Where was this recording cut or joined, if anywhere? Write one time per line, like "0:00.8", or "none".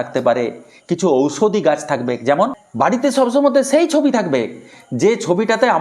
0:02.6

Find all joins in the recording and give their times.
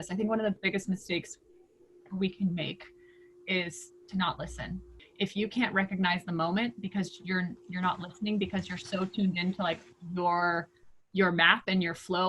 0:05.0

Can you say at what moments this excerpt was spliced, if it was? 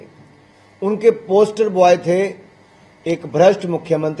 none

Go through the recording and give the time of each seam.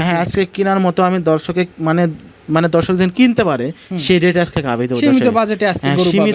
none

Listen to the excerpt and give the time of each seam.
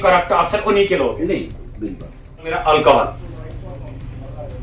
0:02.6

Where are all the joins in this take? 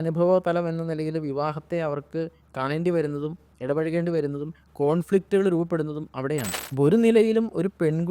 0:06.6

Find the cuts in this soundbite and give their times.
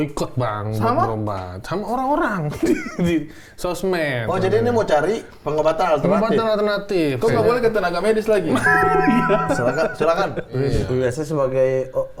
0:10.7

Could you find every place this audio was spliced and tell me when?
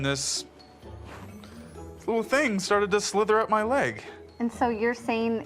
none

